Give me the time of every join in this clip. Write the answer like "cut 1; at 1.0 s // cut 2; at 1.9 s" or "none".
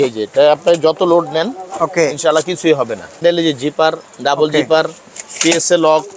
cut 1; at 3.2 s